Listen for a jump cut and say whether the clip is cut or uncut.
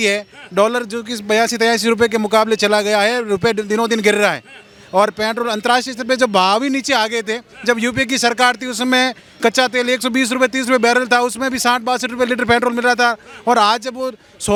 uncut